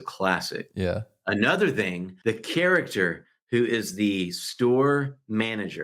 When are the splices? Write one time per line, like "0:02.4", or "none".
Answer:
0:02.1

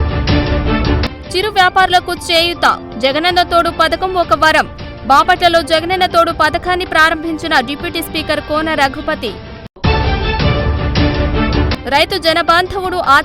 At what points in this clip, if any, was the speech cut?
0:00.9

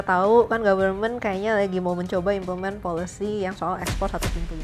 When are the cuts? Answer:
none

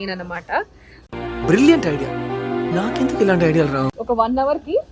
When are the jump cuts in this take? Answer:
0:03.9

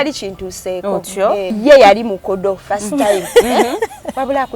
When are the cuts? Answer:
0:01.5

